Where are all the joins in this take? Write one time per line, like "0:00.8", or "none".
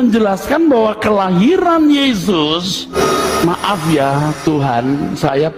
0:02.8